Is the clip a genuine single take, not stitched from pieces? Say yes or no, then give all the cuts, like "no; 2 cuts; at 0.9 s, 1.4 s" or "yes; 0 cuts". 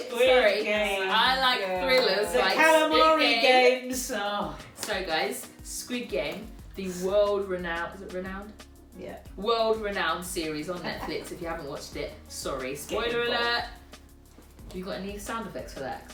yes; 0 cuts